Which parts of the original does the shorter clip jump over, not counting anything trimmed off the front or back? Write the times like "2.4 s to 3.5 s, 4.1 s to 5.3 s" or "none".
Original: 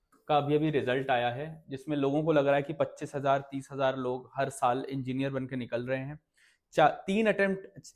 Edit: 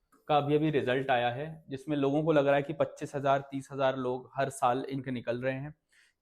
5.0 s to 5.5 s